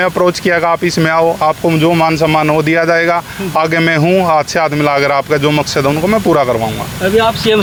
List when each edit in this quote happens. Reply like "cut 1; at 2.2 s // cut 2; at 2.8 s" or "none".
none